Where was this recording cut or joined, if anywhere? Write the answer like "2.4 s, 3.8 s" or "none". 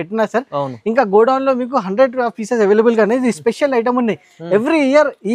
none